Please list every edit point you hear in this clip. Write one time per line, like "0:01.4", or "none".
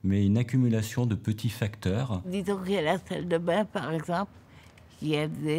0:02.2